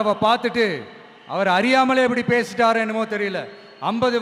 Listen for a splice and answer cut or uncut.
uncut